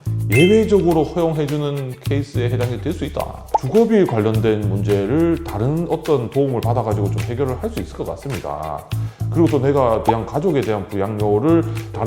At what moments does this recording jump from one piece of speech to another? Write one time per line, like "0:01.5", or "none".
0:03.4